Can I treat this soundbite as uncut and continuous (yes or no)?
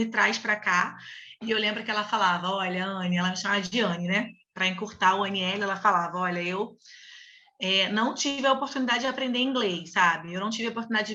yes